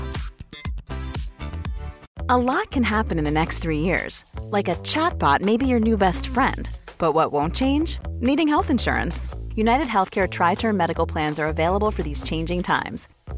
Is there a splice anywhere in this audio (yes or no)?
yes